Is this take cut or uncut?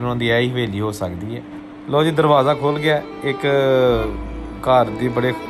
uncut